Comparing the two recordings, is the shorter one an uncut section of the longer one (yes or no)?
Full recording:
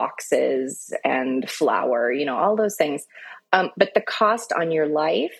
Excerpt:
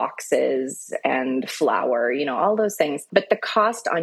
no